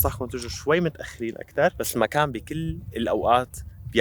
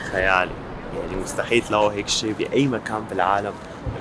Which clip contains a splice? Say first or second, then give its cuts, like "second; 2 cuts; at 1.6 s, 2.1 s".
first; 1 cut; at 1.8 s